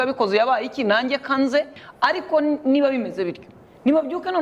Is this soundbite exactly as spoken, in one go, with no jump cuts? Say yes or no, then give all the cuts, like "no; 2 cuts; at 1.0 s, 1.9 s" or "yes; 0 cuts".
no; 1 cut; at 1.8 s